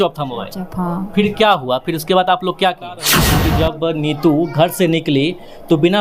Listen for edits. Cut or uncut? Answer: cut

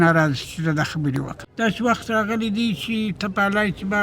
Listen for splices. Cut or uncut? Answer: cut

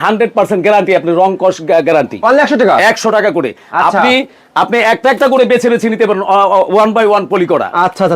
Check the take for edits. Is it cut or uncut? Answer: uncut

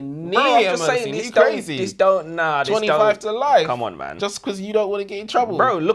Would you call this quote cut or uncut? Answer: uncut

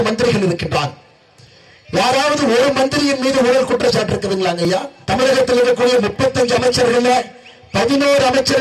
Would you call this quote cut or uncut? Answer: cut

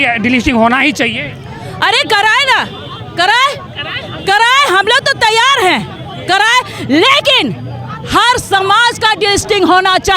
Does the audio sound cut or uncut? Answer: uncut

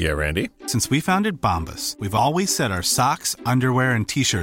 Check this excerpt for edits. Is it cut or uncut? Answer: uncut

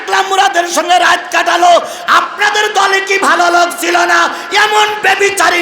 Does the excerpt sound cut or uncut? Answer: uncut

